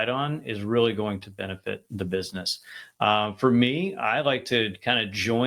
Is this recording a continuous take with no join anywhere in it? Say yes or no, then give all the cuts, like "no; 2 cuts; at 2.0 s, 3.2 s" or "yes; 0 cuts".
yes; 0 cuts